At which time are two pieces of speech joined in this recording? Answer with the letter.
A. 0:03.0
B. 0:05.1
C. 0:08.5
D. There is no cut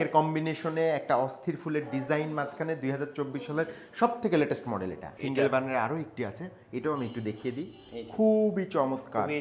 B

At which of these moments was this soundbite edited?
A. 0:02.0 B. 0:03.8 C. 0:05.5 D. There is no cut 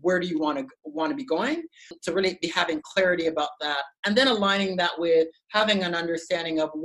A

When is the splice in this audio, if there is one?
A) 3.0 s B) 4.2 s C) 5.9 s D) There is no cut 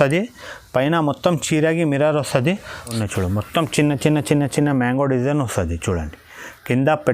A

